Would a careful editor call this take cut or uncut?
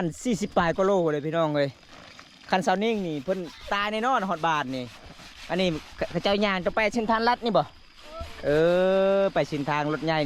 uncut